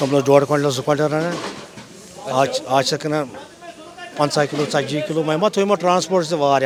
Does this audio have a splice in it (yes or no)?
no